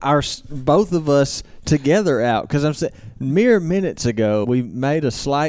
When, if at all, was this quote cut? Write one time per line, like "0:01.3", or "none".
0:04.4